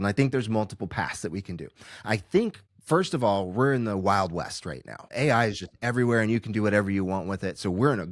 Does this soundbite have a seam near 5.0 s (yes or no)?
yes